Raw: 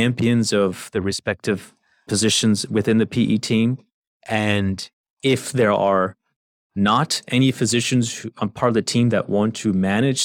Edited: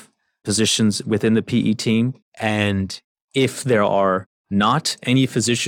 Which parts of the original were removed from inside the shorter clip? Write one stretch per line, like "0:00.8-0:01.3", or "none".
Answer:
0:03.9-0:04.1
0:06.2-0:06.6